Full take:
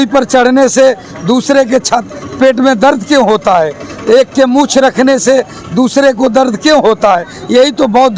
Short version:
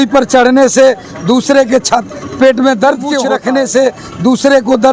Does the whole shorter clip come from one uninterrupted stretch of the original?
no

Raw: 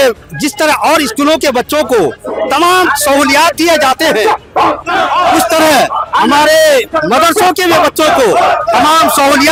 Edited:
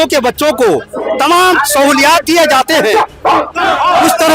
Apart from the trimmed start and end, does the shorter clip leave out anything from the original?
no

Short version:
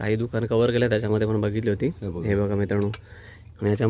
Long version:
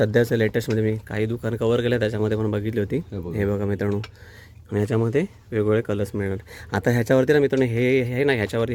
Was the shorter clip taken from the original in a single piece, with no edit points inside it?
yes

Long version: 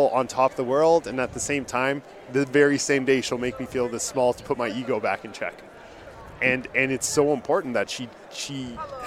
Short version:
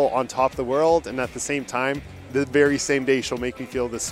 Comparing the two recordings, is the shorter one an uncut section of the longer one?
yes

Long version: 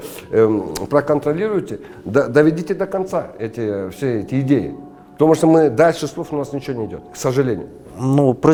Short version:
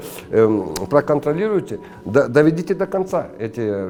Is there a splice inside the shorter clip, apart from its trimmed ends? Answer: no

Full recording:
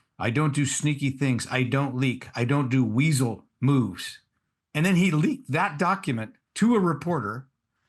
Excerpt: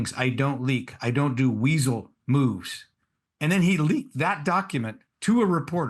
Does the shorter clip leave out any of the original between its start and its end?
no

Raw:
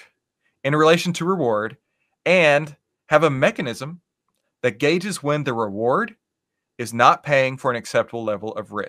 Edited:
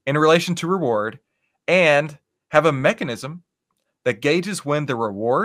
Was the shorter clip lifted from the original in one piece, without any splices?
yes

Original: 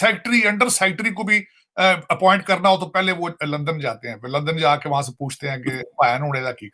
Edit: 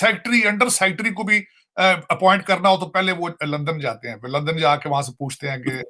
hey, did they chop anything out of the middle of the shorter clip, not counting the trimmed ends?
no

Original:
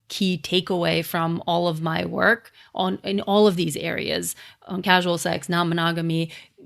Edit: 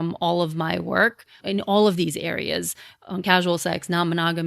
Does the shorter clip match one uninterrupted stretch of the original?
no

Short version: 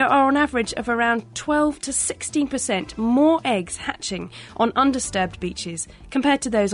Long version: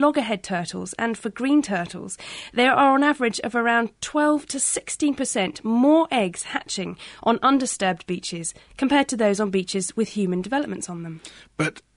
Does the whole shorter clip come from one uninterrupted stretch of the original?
yes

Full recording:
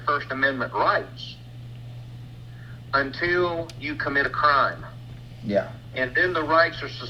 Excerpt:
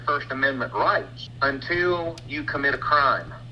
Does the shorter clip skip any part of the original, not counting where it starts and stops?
yes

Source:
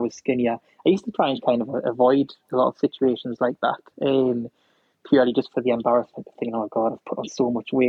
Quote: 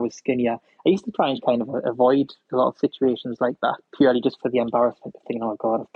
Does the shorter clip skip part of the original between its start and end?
yes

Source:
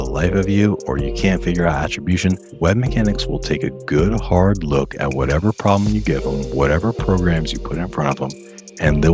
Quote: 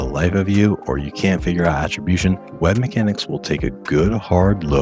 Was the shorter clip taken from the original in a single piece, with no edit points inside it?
yes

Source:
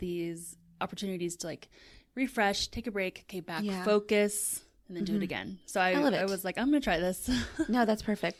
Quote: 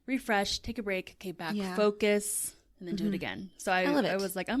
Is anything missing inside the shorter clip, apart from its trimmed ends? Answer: no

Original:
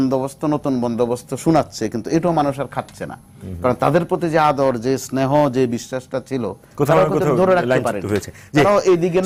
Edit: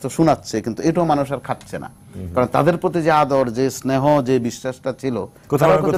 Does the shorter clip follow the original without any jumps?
yes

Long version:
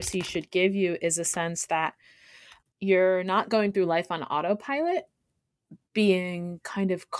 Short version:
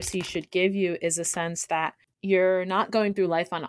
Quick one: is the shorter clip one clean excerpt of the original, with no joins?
no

